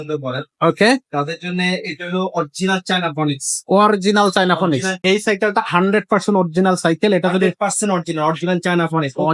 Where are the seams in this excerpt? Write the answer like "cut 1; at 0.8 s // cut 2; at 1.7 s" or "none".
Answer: cut 1; at 5.0 s